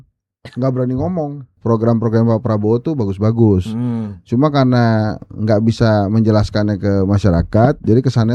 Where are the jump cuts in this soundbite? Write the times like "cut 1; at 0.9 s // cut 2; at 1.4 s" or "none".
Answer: cut 1; at 1.5 s